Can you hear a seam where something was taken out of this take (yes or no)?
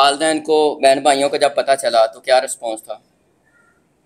no